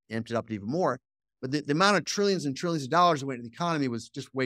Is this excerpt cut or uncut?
uncut